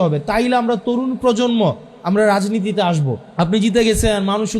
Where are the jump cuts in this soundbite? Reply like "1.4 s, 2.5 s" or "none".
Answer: 3.2 s